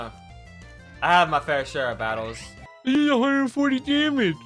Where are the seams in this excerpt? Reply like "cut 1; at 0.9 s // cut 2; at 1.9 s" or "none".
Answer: cut 1; at 3.0 s